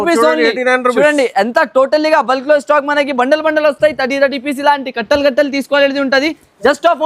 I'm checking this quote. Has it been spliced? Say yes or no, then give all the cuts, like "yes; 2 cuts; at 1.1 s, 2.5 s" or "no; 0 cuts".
no; 0 cuts